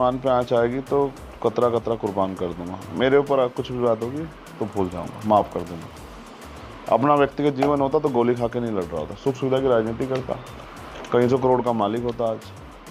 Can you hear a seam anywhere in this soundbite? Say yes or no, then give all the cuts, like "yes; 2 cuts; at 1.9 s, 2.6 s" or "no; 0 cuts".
no; 0 cuts